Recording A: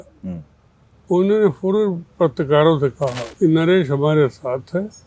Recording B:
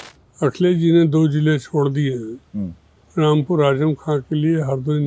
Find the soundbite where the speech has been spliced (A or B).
A